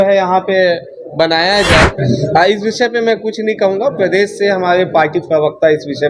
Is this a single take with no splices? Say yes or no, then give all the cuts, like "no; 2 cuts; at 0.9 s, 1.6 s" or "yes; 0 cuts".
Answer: no; 1 cut; at 2.0 s